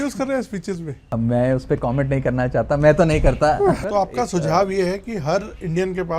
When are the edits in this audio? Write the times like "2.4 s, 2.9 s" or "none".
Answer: 0.9 s, 3.8 s